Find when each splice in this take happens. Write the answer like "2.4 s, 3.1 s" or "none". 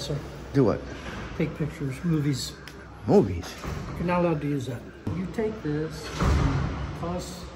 5.1 s